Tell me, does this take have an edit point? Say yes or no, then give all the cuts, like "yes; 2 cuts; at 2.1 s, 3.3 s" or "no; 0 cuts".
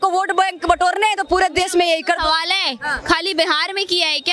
no; 0 cuts